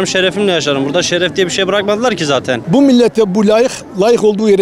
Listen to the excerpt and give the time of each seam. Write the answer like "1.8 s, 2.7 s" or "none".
2.6 s